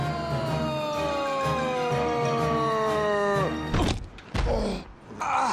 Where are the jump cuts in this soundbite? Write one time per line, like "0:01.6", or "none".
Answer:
0:04.6